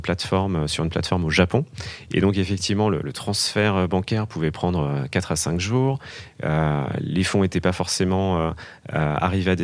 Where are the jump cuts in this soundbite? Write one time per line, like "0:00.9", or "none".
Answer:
none

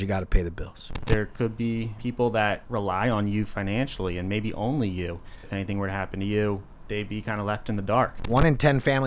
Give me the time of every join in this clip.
0:01.0
0:02.0
0:02.6
0:05.5
0:06.7
0:08.3

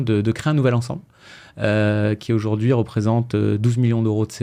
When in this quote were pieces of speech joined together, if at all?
none

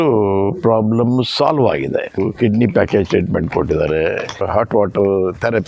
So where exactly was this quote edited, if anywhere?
0:02.2
0:04.4

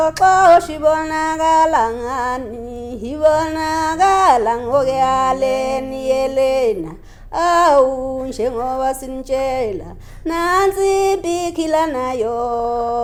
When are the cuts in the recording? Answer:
none

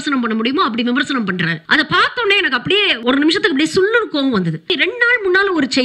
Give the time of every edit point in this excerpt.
0:01.6
0:03.0
0:04.7

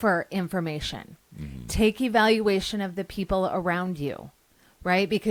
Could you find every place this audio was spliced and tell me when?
none

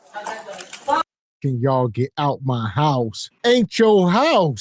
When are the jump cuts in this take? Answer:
0:03.2

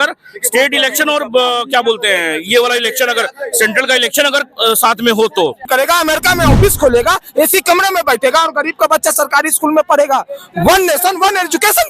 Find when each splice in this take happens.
0:05.7

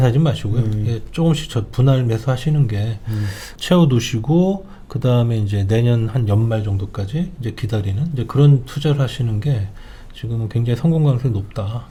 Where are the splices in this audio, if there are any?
none

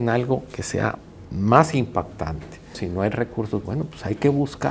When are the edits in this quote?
0:02.8

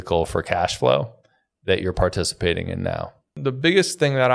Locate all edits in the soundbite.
0:03.3

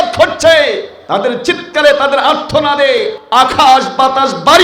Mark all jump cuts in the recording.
0:00.9
0:03.2

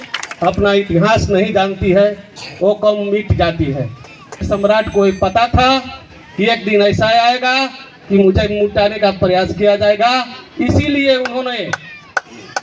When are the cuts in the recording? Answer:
0:04.4

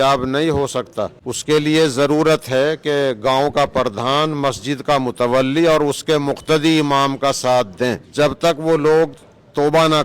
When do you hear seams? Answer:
0:01.2
0:08.0

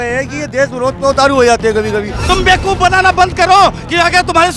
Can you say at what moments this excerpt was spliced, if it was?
0:02.2

